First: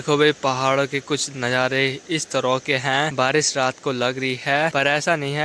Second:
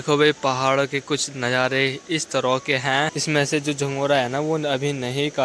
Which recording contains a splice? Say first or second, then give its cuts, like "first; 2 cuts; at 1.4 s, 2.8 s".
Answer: second; 1 cut; at 3.1 s